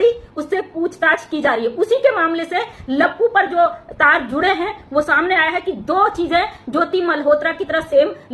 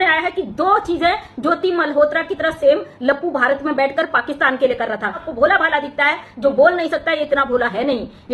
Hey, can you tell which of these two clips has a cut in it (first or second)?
second